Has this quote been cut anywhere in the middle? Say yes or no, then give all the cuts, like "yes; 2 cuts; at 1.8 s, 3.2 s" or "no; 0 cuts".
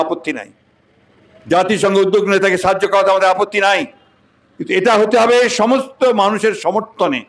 no; 0 cuts